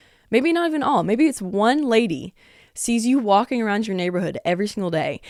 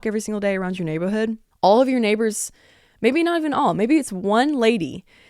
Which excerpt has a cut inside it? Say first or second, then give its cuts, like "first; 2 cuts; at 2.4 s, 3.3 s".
second; 1 cut; at 1.5 s